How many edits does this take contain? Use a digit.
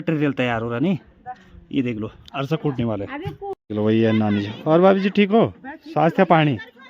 1